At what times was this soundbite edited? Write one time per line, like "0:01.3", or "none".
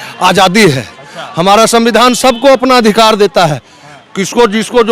none

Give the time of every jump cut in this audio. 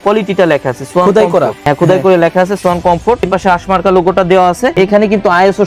0:01.6
0:03.3
0:04.7

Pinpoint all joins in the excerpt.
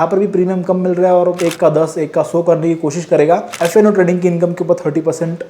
0:01.4
0:03.5

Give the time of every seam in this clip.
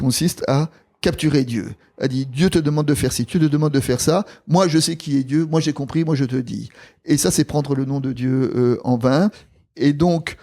none

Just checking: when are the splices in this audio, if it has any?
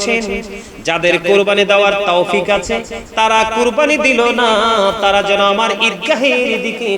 none

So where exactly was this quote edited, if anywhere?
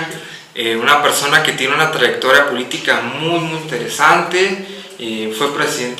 none

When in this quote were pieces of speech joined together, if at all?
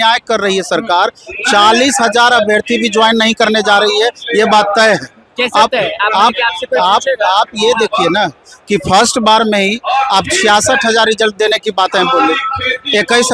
none

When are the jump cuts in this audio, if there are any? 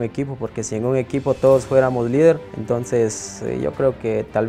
0:02.5

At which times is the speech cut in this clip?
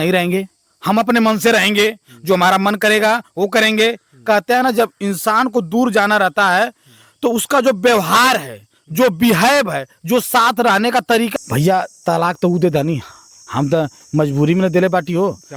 0:11.3

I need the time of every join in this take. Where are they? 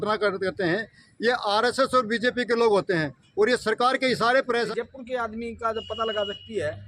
0:04.7

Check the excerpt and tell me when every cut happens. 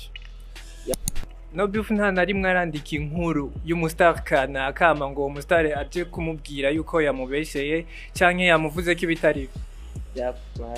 0:00.9

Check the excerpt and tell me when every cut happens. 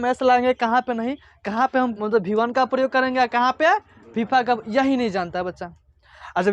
0:02.0

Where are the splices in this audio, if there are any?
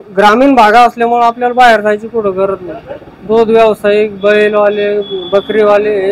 none

